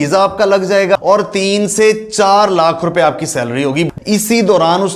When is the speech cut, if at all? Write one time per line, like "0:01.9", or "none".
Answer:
0:01.0
0:03.9